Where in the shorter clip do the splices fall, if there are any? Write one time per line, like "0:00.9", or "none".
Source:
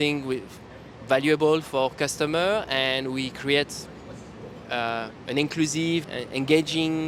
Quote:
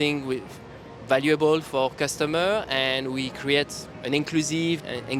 0:03.9